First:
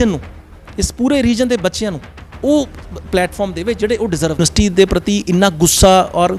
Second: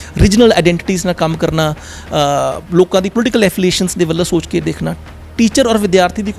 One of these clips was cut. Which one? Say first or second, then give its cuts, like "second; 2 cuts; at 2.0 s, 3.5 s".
first; 1 cut; at 4.4 s